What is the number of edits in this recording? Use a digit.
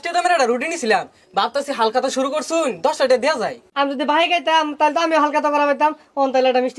1